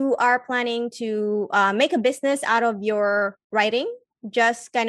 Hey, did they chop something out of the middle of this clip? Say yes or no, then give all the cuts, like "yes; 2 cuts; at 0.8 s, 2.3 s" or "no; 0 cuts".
yes; 1 cut; at 3.4 s